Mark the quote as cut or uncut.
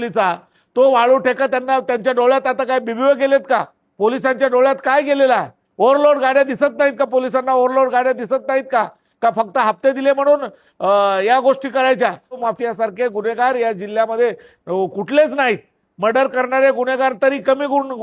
cut